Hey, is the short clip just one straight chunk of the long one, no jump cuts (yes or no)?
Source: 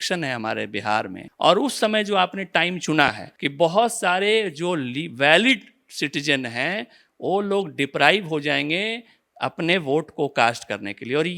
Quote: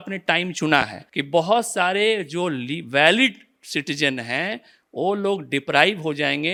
yes